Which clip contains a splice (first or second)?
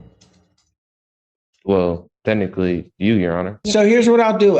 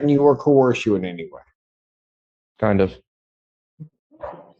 first